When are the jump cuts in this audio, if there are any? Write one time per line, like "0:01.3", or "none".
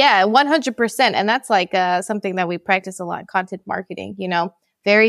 none